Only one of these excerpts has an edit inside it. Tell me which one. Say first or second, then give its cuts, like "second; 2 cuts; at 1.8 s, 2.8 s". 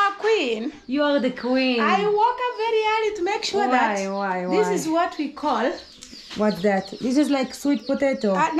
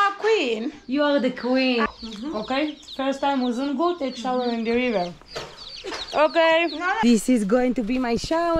second; 2 cuts; at 1.9 s, 7.0 s